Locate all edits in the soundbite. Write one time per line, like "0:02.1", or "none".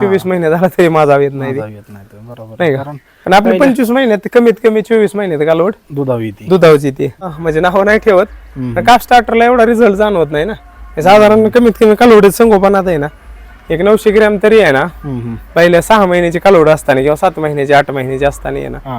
0:07.4